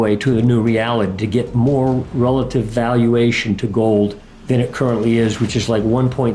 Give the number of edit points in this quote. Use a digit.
1